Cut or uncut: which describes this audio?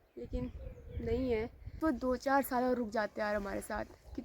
cut